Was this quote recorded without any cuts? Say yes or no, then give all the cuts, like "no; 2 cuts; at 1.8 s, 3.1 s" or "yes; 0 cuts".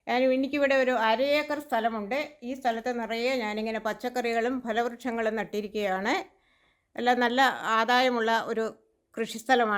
yes; 0 cuts